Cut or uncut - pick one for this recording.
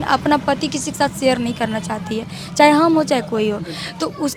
uncut